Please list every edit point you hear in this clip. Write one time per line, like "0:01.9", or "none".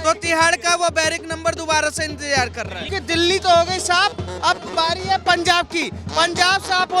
0:02.9